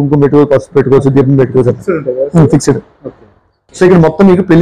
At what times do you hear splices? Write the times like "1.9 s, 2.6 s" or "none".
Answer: 3.6 s